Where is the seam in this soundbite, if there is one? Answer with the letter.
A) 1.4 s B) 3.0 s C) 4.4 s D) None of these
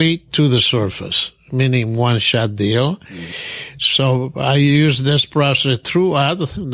B